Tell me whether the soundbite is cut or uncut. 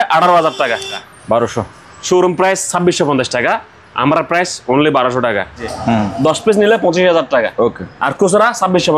cut